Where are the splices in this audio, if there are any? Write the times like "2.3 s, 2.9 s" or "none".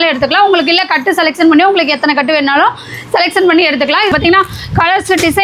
4.1 s